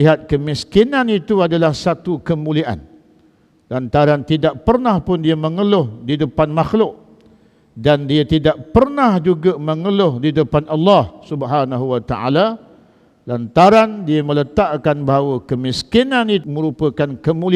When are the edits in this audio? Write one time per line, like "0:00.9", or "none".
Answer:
0:16.4